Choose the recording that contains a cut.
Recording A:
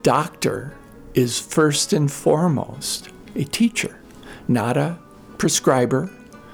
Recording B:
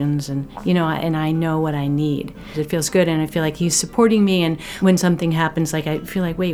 B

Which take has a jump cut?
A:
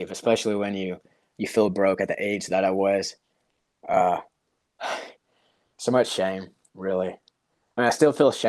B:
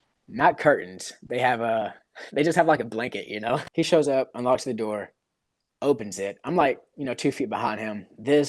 B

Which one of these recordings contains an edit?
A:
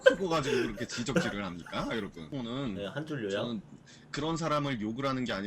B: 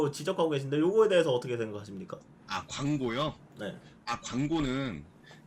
A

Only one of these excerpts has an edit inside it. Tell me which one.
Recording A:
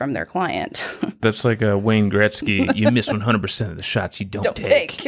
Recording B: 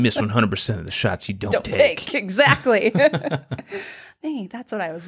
A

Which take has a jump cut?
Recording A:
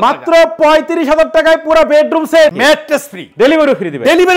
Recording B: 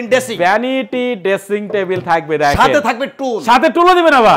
A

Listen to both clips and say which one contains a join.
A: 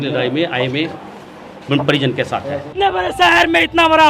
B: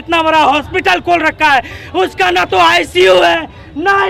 A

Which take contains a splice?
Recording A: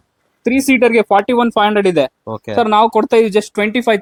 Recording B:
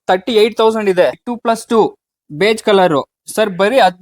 B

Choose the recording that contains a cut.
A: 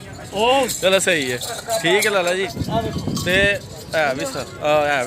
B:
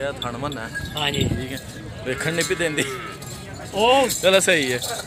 A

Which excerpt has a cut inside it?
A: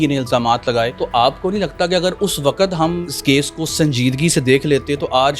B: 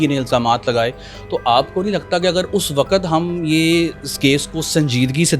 A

